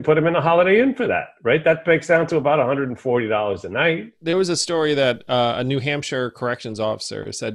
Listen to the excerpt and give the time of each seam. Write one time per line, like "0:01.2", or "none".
0:04.1